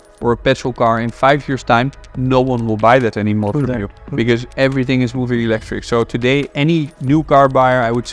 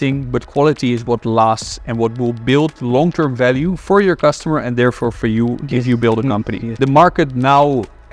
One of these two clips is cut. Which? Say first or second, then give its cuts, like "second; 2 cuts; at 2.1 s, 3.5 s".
second; 1 cut; at 6.6 s